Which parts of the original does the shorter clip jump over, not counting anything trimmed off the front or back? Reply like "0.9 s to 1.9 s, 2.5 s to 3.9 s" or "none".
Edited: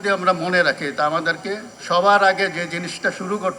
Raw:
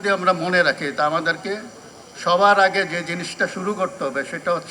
1.7 s to 2.1 s